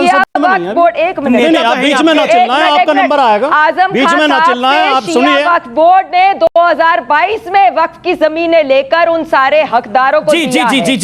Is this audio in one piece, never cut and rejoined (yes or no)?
yes